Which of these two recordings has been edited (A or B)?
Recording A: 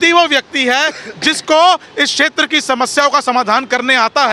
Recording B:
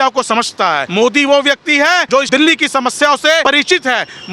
B